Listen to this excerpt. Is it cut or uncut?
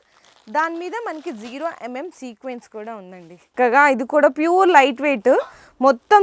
cut